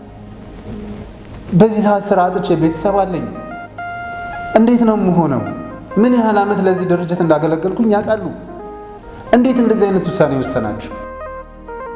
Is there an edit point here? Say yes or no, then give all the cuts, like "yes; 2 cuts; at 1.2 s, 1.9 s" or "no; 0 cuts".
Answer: no; 0 cuts